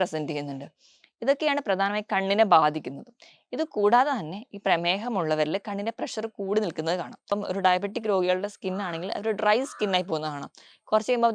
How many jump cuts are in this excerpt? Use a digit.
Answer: 1